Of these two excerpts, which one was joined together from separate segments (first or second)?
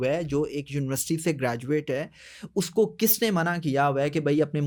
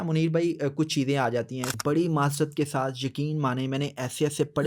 second